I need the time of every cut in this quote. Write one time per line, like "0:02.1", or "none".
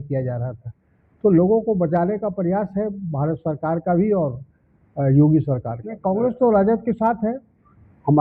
0:06.0